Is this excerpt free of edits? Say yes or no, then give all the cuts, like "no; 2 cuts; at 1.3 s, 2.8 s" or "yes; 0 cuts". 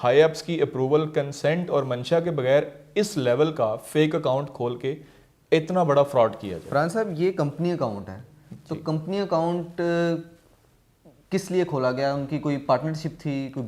yes; 0 cuts